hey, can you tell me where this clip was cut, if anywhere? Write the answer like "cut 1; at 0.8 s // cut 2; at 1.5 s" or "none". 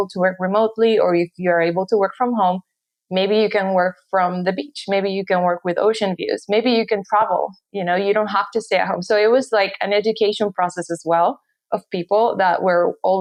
none